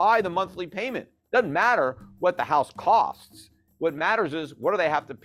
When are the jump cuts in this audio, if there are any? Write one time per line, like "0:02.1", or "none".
none